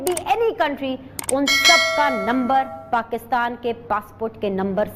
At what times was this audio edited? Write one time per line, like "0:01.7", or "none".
none